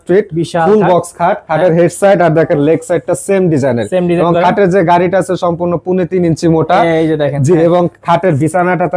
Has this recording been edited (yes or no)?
no